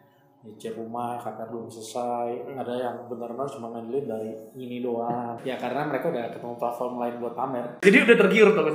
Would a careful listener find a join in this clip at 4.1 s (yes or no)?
no